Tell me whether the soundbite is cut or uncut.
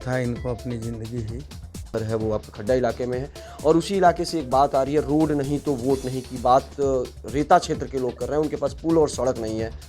cut